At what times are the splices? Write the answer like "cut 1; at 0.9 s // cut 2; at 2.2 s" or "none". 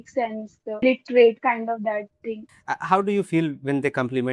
cut 1; at 0.8 s // cut 2; at 2.5 s